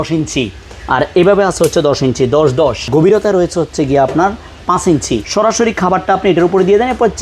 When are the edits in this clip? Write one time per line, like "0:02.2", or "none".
0:02.9
0:05.2

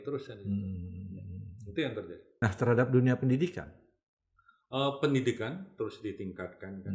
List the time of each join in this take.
0:02.3

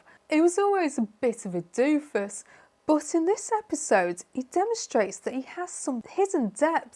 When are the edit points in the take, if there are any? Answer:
0:06.0

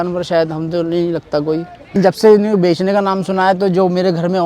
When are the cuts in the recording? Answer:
0:01.9

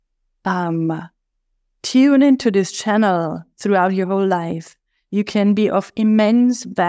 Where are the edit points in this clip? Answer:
none

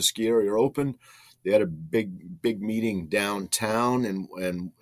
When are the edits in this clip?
none

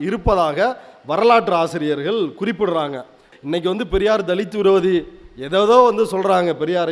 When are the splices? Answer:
0:03.3

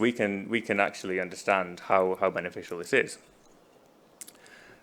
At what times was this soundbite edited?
none

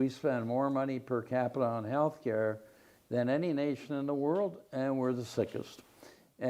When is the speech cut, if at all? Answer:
none

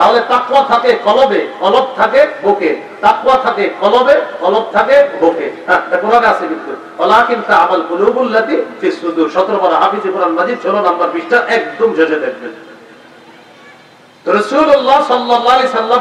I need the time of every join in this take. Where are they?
none

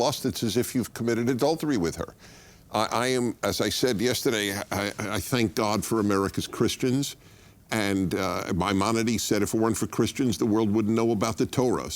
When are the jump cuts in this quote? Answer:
0:06.9

